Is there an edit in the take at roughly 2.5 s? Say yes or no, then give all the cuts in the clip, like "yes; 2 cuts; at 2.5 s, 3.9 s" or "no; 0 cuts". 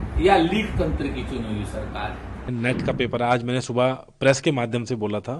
yes; 1 cut; at 2.5 s